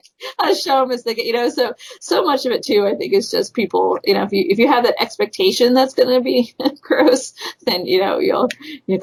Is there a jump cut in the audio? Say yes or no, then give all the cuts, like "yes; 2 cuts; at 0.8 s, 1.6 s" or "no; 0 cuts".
no; 0 cuts